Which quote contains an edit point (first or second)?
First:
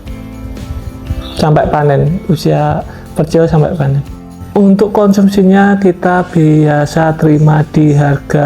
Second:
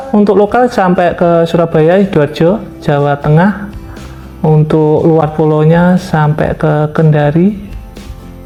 first